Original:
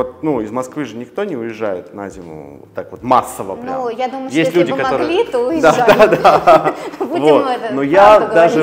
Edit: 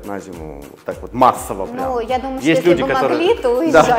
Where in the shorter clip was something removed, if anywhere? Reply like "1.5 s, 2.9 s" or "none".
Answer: none